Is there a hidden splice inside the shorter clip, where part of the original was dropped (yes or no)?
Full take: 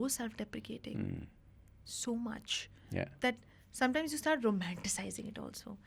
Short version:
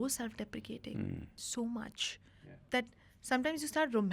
yes